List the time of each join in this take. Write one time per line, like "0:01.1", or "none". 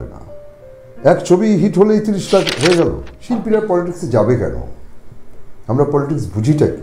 0:03.1

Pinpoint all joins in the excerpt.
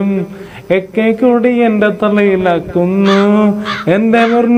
none

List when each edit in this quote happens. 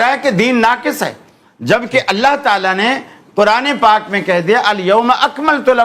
none

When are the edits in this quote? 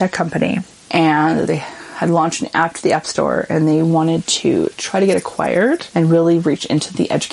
0:01.5
0:05.9

